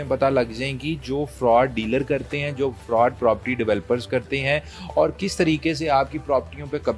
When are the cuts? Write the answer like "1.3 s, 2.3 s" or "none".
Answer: none

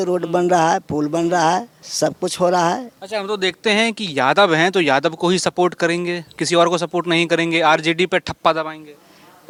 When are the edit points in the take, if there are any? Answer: none

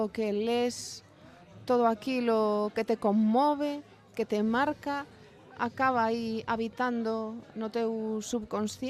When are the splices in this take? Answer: none

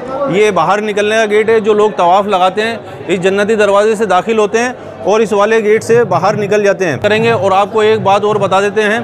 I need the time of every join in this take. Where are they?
7.0 s

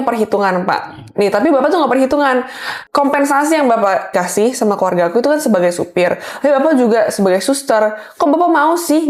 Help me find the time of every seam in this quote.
2.7 s, 4.1 s

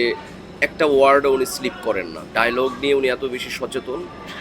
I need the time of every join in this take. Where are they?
2.2 s

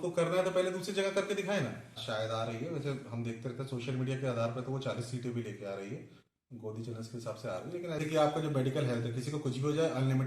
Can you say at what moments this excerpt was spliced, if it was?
2.0 s, 8.0 s

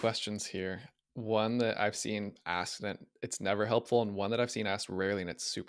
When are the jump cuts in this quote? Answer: none

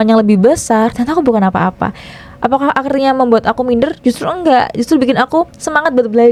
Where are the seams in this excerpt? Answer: none

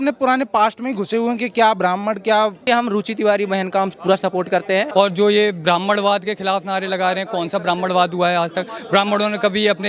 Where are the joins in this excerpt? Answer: 2.6 s, 4.9 s

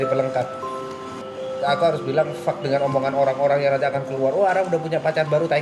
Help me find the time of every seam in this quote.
1.2 s

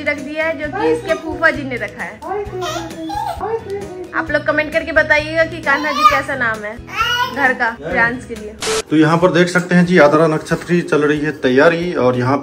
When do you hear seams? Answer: none

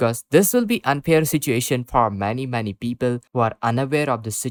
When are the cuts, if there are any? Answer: none

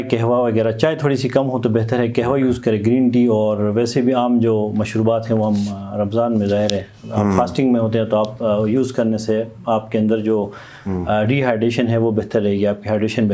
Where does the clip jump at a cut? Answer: none

